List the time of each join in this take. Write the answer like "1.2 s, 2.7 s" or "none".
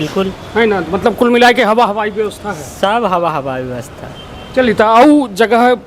none